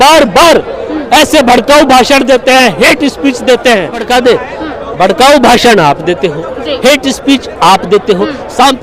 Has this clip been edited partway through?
yes; 1 cut; at 4.1 s

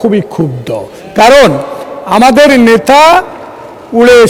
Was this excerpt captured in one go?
yes; 0 cuts

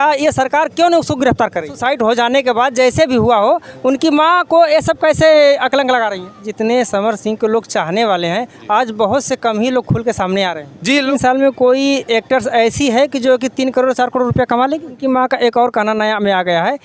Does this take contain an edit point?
yes; 4 cuts; at 1.8 s, 6.4 s, 11.1 s, 14.9 s

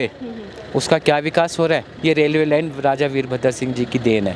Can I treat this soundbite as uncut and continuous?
no; 1 cut; at 2.0 s

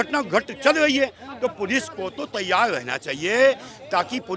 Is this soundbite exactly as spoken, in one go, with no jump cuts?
yes; 0 cuts

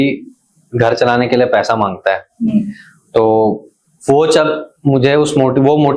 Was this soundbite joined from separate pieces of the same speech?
no; 0 cuts

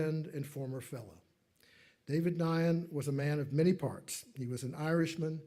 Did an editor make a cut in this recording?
no; 0 cuts

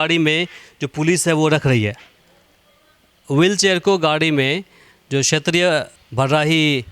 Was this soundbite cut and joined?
yes; 1 cut; at 6.0 s

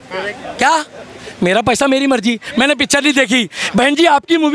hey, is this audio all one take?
yes; 0 cuts

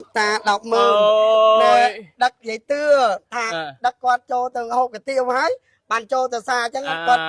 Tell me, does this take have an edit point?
no; 0 cuts

